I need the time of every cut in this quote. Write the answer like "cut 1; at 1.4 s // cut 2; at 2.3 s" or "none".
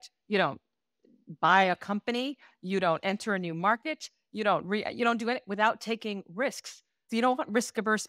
cut 1; at 7.0 s